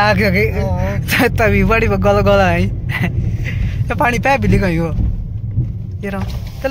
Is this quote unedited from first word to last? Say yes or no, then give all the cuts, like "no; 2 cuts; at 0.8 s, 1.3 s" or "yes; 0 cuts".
yes; 0 cuts